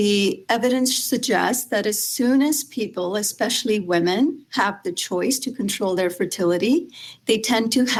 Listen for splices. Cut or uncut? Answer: uncut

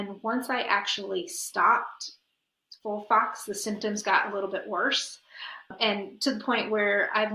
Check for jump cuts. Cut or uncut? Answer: uncut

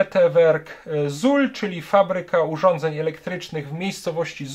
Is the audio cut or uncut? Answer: uncut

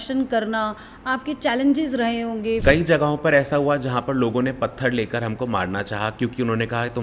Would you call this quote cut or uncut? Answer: cut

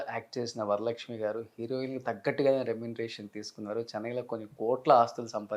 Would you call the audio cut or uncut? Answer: uncut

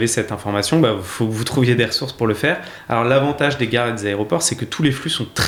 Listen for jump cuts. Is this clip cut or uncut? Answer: uncut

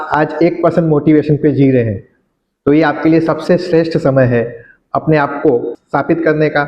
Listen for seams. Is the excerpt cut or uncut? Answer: cut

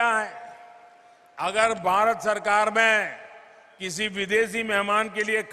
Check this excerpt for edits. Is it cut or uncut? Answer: uncut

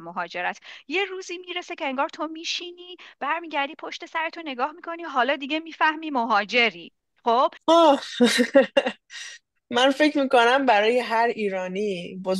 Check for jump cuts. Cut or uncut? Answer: cut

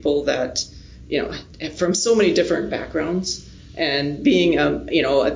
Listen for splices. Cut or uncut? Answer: uncut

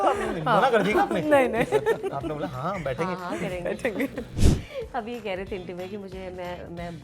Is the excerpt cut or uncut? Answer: cut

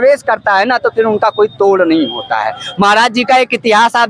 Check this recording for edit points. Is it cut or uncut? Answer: uncut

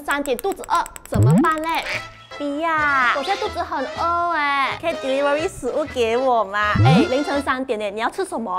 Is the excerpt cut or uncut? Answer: cut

